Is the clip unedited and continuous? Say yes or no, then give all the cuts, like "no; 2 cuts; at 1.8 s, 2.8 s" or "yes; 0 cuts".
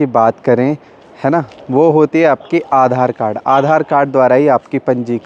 yes; 0 cuts